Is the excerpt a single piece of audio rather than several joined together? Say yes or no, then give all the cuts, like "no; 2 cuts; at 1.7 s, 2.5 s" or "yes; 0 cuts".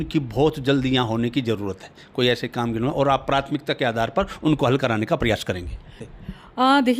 no; 1 cut; at 6.1 s